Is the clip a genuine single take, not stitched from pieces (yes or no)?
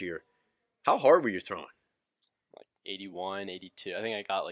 yes